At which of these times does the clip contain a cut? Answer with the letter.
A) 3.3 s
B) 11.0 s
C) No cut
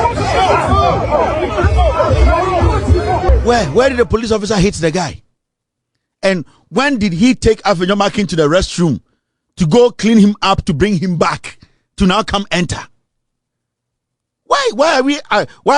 A